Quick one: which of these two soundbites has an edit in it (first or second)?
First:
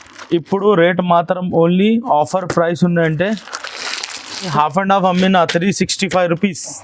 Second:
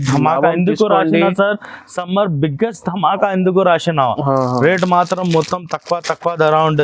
first